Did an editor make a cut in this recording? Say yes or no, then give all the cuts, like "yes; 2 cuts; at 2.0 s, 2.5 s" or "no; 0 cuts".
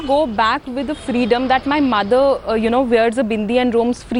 no; 0 cuts